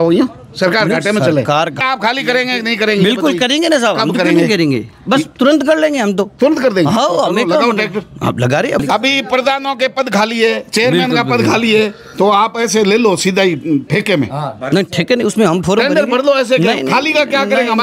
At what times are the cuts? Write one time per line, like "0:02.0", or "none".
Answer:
0:01.8
0:08.8